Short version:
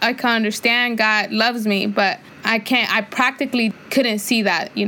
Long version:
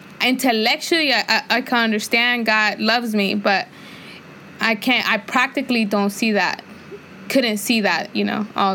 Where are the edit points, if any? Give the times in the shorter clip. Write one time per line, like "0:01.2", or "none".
0:02.3
0:03.7